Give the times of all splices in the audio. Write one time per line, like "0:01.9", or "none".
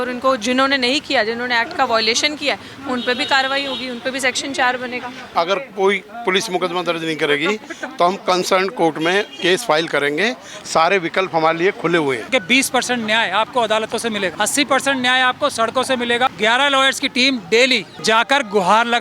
0:05.3
0:12.3
0:14.3
0:16.3
0:17.9